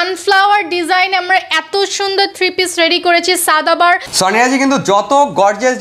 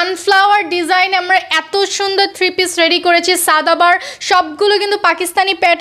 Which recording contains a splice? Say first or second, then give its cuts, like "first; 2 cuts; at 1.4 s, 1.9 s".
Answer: first; 1 cut; at 4.1 s